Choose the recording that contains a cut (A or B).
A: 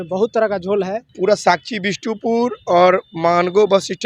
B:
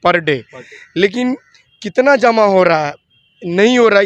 A